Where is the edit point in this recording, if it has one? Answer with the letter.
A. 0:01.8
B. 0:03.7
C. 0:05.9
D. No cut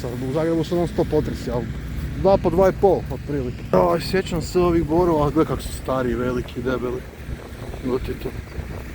B